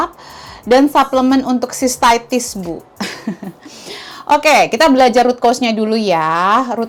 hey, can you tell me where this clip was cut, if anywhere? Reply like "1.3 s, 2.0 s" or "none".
none